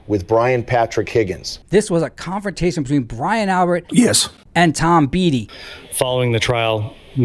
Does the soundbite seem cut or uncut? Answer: cut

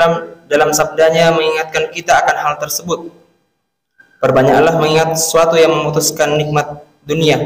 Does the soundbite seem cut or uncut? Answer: uncut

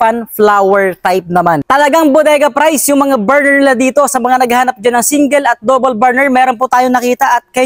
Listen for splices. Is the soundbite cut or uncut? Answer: cut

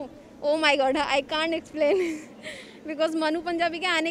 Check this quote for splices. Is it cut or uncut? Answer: uncut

